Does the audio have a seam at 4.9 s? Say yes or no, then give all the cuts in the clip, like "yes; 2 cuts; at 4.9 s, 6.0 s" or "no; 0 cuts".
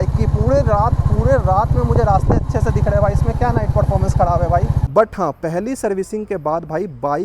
yes; 1 cut; at 4.9 s